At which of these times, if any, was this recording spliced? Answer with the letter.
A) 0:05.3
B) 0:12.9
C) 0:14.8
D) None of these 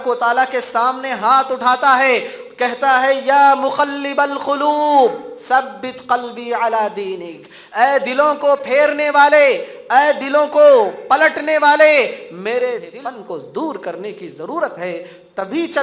B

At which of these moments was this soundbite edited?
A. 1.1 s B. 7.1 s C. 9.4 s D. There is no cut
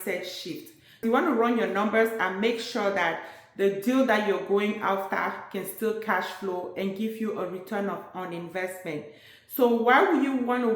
A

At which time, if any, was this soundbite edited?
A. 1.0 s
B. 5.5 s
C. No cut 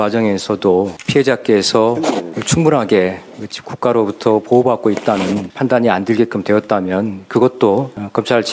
A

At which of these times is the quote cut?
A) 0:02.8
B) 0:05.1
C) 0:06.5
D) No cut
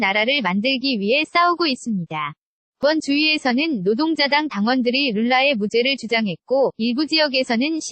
A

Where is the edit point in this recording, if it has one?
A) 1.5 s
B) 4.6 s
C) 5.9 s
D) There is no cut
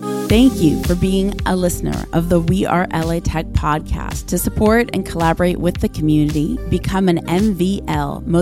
D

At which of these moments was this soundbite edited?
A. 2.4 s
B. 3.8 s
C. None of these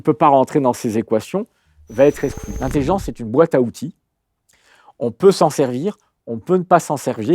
A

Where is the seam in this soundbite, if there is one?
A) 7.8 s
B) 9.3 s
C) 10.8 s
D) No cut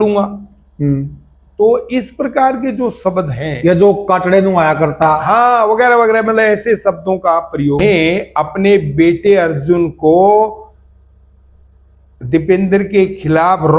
A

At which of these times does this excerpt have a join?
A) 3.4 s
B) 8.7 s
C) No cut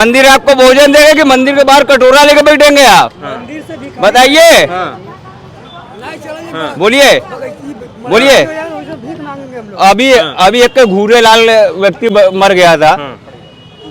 C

